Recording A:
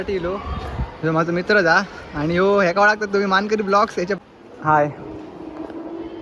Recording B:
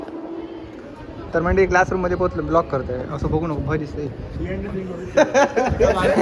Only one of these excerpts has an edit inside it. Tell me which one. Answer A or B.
A